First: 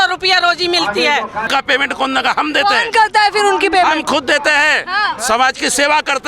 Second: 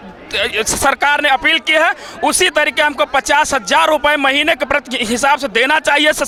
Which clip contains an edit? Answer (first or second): first